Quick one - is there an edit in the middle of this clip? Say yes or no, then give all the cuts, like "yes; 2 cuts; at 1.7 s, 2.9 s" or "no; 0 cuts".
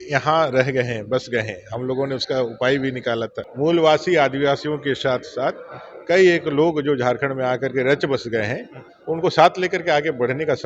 yes; 1 cut; at 3.4 s